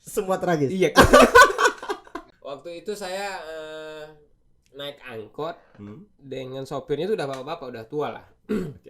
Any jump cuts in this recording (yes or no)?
yes